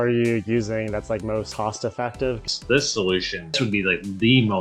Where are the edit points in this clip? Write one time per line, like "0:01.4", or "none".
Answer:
0:01.5
0:02.5
0:03.5